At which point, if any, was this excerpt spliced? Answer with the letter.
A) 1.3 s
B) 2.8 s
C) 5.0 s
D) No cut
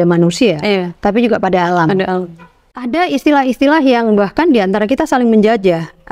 B